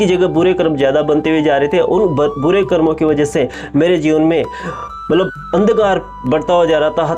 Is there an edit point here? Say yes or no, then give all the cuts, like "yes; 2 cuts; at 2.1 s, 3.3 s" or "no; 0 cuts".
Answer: no; 0 cuts